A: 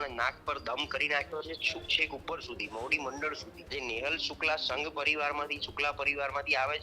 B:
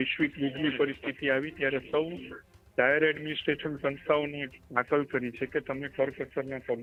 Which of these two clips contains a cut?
A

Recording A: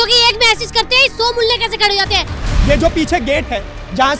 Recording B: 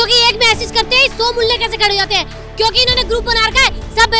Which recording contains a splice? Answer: A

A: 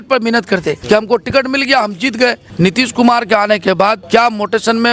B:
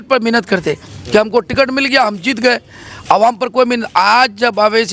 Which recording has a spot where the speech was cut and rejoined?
A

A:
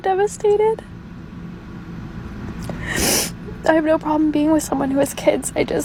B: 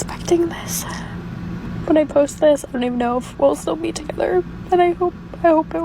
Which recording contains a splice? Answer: B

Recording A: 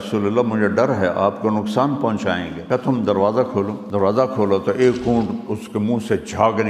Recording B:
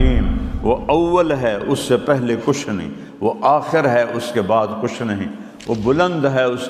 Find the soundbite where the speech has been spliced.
A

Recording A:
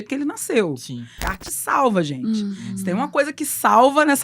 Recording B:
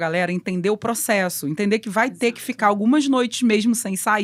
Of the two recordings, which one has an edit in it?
A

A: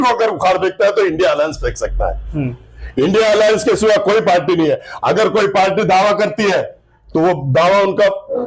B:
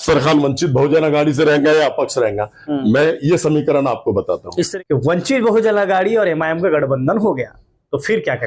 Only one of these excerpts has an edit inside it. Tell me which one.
B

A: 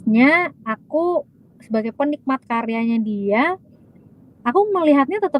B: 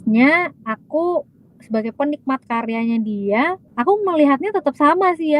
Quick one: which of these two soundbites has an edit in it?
B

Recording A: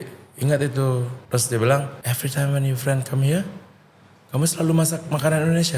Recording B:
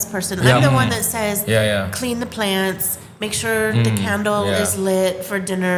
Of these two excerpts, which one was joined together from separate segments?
A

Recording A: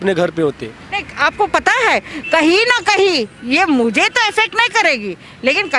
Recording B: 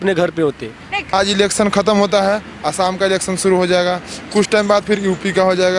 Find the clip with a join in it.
B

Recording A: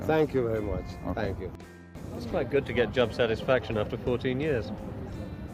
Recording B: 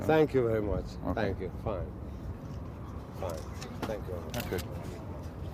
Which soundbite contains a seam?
A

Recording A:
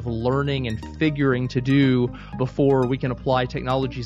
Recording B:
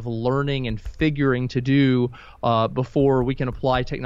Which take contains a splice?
A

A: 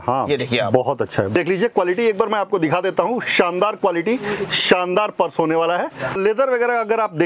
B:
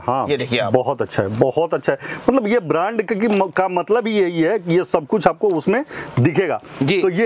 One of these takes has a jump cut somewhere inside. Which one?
A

